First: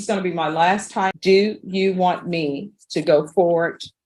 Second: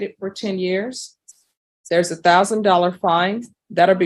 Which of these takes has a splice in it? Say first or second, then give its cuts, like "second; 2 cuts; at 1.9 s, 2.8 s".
first; 1 cut; at 1.2 s